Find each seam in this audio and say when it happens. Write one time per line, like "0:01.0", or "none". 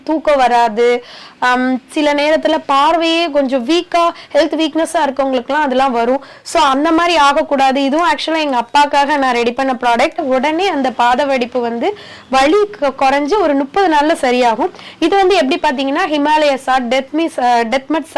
0:10.2

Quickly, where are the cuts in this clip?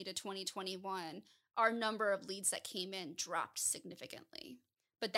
none

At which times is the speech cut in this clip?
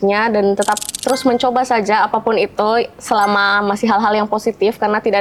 none

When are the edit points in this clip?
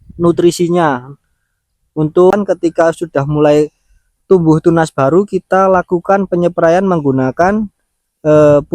0:02.3

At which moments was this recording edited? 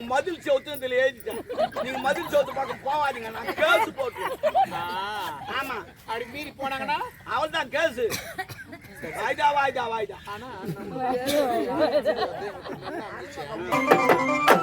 0:13.7

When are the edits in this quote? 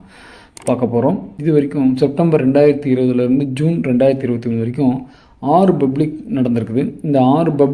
0:01.3

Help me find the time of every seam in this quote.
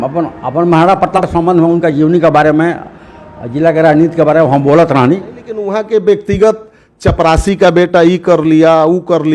0:01.2
0:05.6

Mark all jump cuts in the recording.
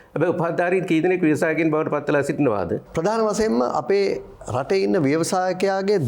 0:02.9

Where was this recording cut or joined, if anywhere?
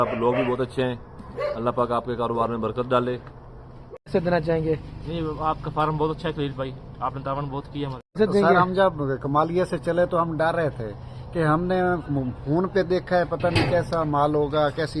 0:04.0
0:08.2

